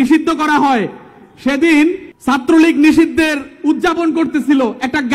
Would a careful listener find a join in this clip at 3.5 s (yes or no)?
no